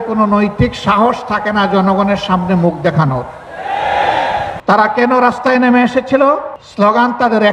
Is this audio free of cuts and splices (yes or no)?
no